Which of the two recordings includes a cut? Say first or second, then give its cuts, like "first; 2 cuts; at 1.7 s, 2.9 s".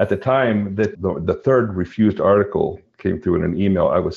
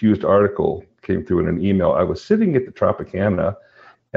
first; 1 cut; at 0.9 s